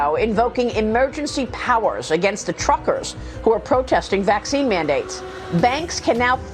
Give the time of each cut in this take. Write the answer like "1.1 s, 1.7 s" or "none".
none